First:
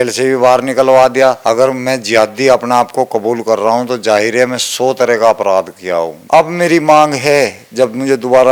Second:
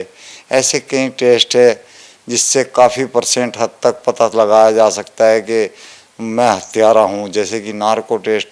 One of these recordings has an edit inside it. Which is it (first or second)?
first